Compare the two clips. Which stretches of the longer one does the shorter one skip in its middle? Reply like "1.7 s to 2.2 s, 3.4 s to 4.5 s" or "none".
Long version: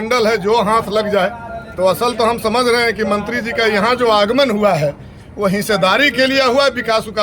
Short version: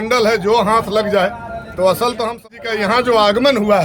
2.3 s to 3.3 s